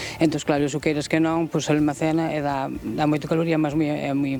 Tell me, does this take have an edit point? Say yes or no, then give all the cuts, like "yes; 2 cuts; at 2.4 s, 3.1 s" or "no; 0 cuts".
no; 0 cuts